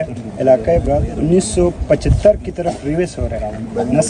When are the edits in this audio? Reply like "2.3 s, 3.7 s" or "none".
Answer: 1.1 s